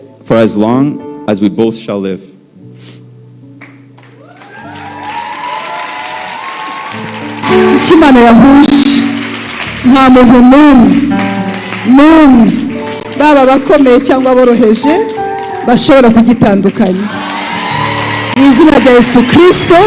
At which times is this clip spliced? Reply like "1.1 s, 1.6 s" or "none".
7.4 s